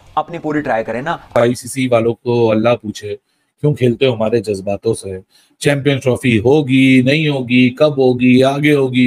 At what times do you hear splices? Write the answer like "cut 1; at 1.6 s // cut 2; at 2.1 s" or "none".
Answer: cut 1; at 1.3 s